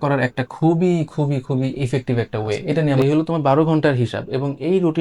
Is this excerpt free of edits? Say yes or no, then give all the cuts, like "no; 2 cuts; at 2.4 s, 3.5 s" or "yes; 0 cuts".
no; 1 cut; at 3.0 s